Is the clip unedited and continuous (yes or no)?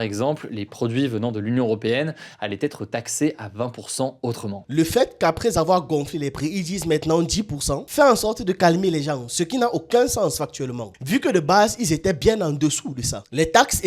no